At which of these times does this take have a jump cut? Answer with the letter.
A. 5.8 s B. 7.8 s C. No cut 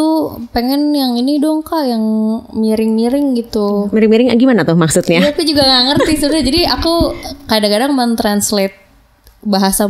C